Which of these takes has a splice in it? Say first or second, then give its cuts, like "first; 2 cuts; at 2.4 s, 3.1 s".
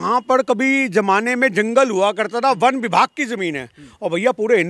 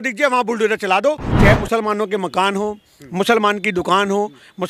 second; 1 cut; at 1.3 s